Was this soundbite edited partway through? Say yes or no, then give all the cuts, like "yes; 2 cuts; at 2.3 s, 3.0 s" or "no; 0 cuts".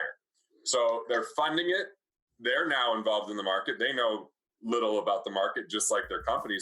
no; 0 cuts